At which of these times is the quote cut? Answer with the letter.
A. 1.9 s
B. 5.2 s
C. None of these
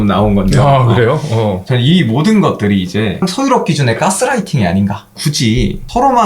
B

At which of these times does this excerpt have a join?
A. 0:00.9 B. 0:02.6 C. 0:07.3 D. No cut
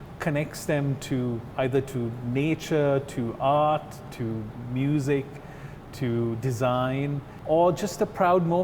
C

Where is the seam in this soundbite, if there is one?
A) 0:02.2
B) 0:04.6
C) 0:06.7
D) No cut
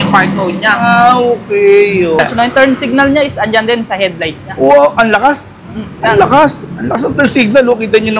A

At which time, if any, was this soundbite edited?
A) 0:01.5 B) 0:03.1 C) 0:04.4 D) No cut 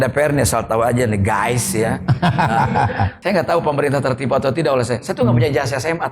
B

